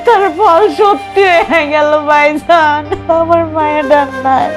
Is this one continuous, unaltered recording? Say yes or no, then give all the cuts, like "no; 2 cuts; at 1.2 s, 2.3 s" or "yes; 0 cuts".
yes; 0 cuts